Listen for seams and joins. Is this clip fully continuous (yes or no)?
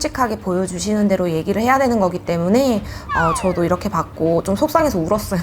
yes